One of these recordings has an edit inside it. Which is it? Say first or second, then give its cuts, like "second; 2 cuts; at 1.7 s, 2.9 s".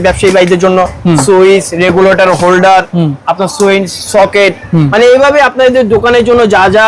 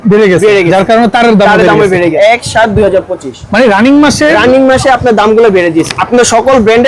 second; 2 cuts; at 2.1 s, 6.0 s